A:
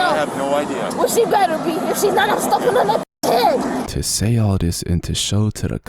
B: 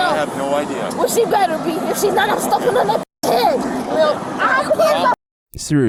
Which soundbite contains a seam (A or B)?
A